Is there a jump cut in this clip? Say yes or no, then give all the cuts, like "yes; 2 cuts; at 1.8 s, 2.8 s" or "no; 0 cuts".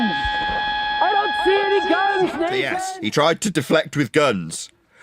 yes; 1 cut; at 2.7 s